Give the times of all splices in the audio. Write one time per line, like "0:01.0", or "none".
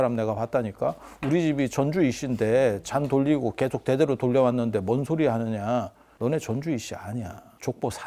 none